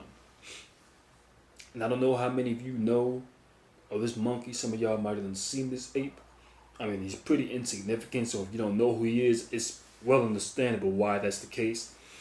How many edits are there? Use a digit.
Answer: 1